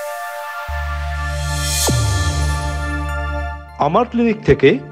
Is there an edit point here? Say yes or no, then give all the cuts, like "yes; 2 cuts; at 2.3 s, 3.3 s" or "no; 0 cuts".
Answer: no; 0 cuts